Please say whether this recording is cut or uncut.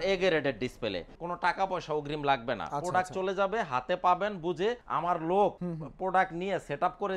cut